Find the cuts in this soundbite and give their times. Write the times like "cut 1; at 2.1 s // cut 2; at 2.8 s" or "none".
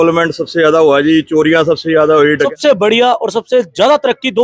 cut 1; at 2.4 s